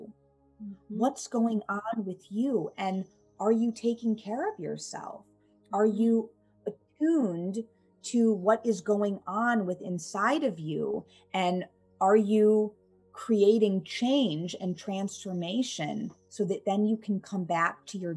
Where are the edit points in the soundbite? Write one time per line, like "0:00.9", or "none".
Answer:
0:16.2